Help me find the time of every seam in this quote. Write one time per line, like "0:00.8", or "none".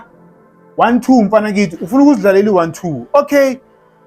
none